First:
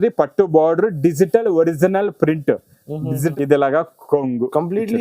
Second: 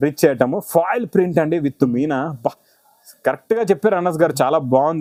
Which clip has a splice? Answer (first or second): first